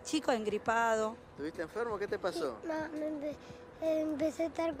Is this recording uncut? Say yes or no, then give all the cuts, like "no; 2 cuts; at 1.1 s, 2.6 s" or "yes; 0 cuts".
no; 1 cut; at 1.3 s